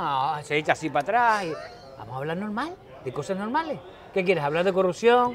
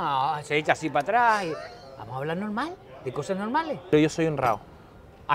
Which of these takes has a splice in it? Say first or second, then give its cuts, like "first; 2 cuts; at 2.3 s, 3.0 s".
second; 1 cut; at 3.9 s